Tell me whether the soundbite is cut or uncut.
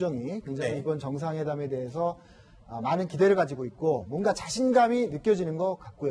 uncut